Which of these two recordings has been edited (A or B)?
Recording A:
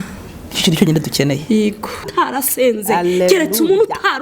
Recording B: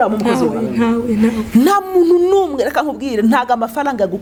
A